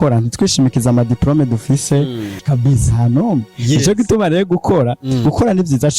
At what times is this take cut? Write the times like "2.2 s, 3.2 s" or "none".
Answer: 2.4 s